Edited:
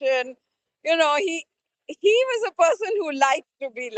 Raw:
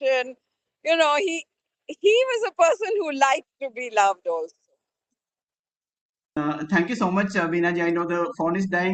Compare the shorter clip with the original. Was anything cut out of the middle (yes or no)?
no